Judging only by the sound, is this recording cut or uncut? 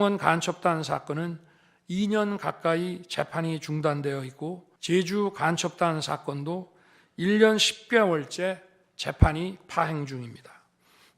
cut